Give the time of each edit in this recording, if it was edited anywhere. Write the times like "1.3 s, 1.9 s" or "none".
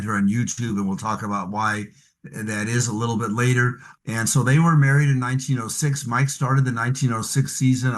3.8 s